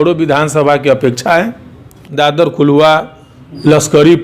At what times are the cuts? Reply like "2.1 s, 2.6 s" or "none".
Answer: 2.0 s